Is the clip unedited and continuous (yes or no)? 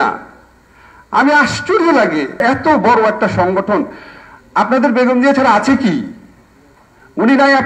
no